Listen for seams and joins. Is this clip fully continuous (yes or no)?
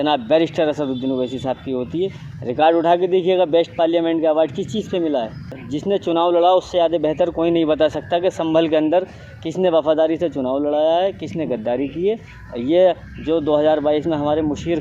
no